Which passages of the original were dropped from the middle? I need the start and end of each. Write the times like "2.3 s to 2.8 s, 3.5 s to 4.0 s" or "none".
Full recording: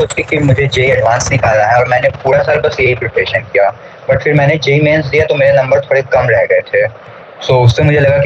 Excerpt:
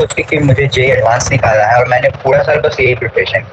none